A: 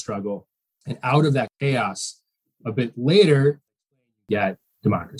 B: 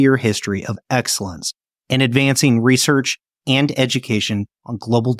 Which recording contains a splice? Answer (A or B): A